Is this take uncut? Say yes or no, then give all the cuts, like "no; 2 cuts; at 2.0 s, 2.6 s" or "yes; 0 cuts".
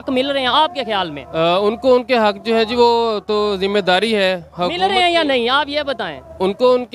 yes; 0 cuts